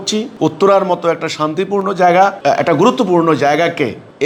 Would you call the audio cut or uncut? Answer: uncut